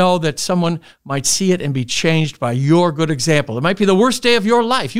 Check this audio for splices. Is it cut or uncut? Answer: uncut